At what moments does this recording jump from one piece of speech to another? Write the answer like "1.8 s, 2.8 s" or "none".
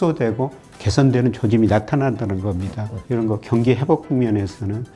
2.9 s